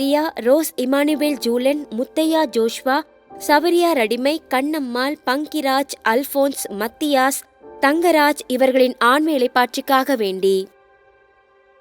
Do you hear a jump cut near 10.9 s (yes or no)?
yes